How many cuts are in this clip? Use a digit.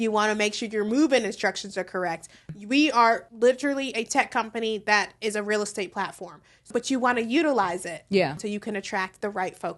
4